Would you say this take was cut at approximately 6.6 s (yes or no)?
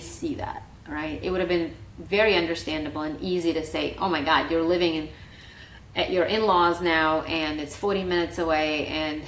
no